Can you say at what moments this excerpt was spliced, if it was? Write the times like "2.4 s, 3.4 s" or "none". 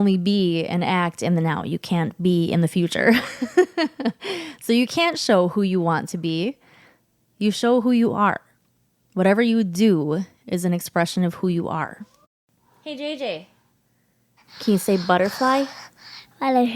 12.5 s